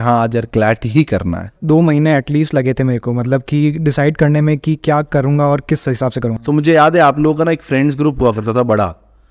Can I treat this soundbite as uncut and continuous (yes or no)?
no